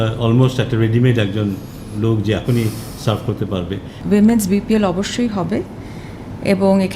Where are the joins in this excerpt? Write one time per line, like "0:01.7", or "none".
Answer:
0:03.9